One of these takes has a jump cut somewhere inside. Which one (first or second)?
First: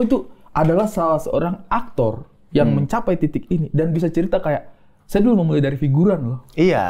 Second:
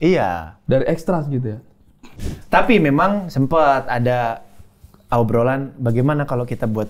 second